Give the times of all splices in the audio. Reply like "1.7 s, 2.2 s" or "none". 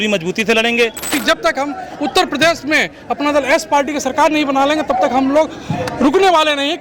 1.1 s